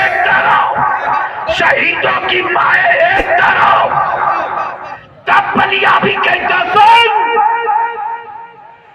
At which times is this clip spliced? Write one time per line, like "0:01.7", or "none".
0:04.9

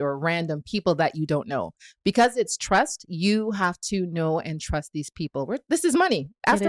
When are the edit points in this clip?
none

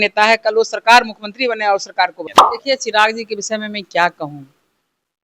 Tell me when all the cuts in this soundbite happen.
0:02.2

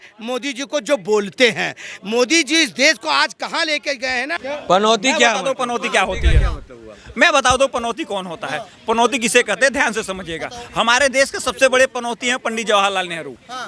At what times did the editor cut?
0:04.3

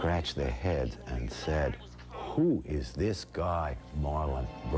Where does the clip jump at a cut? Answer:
none

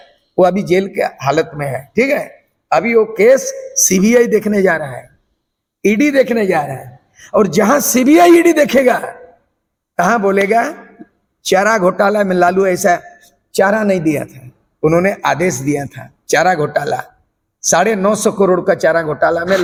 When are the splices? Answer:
none

